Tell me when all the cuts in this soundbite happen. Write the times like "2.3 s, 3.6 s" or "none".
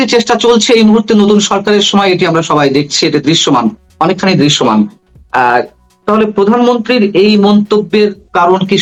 none